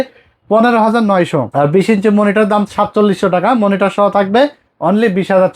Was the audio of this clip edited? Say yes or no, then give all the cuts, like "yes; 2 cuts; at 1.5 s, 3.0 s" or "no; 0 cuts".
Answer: yes; 2 cuts; at 1.5 s, 4.7 s